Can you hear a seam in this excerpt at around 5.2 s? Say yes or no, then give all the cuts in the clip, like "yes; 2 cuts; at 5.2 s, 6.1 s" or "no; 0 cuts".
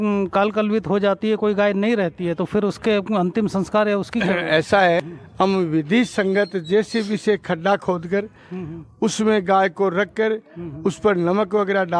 yes; 1 cut; at 5.2 s